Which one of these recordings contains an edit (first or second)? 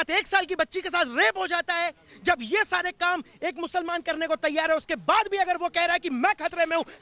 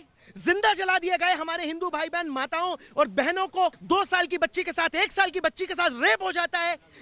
second